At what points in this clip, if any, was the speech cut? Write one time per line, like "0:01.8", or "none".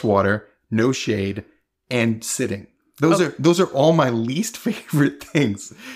none